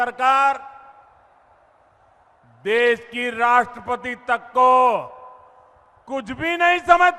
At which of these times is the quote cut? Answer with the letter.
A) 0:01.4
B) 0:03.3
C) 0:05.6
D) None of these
D